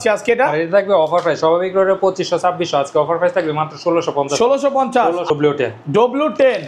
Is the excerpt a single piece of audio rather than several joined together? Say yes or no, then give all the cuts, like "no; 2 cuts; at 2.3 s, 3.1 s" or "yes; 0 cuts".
no; 1 cut; at 5.3 s